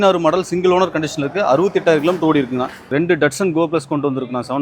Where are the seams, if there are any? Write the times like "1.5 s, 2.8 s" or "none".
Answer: 2.9 s